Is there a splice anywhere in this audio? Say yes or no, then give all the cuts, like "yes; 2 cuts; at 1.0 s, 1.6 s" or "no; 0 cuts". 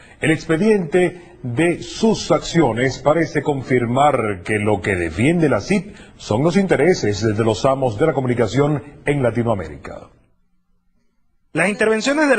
yes; 1 cut; at 3.6 s